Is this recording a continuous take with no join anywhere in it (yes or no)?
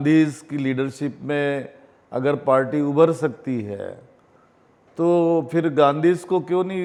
yes